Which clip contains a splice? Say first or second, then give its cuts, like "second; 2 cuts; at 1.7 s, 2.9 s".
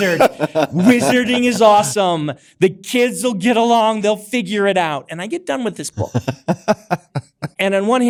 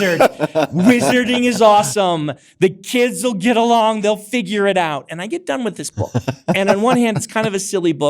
second; 1 cut; at 6.6 s